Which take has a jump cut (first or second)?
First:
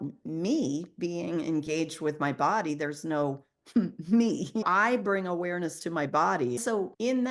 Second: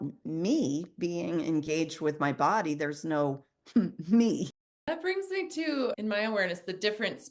second